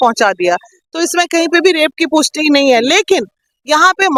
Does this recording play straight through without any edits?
yes; 0 cuts

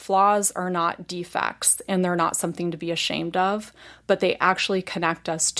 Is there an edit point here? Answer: no; 0 cuts

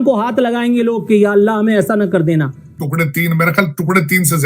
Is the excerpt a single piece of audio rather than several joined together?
no; 1 cut; at 2.7 s

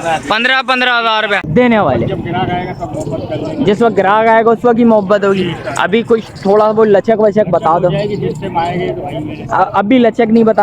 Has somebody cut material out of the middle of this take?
yes; 1 cut; at 1.5 s

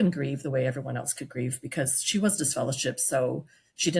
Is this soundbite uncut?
yes; 0 cuts

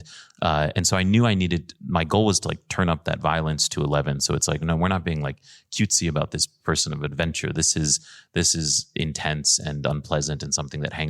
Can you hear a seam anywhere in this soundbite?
no; 0 cuts

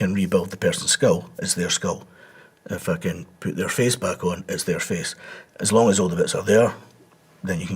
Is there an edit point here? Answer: yes; 1 cut; at 5.4 s

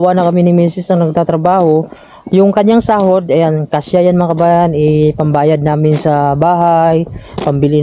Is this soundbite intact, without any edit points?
yes; 0 cuts

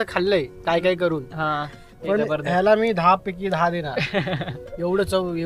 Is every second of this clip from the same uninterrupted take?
yes; 0 cuts

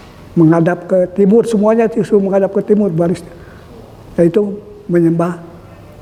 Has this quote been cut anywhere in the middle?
no; 0 cuts

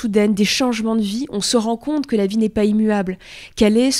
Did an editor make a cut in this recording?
no; 0 cuts

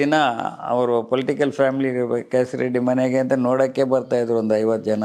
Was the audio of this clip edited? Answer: no; 0 cuts

